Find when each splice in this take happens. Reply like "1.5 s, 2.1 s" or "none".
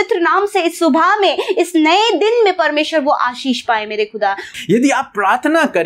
4.5 s